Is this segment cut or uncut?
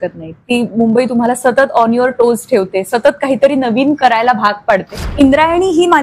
cut